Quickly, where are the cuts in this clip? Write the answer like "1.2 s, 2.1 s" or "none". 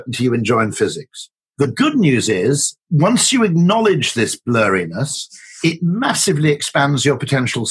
none